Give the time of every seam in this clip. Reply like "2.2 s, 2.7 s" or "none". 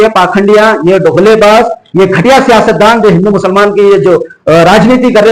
none